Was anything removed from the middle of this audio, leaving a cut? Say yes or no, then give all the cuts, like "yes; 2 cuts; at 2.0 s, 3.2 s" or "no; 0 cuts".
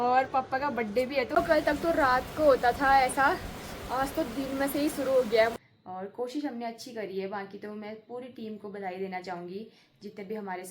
yes; 2 cuts; at 1.4 s, 5.5 s